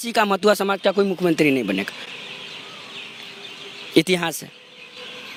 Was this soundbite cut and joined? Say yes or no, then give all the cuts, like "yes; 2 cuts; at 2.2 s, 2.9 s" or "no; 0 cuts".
no; 0 cuts